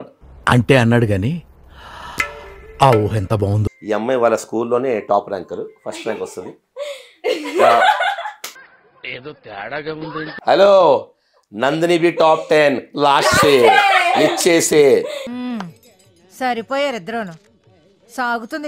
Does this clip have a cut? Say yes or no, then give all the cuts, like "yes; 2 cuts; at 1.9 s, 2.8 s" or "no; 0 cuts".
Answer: yes; 2 cuts; at 3.7 s, 10.4 s